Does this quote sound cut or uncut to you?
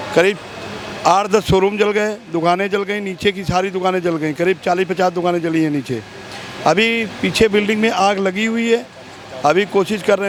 uncut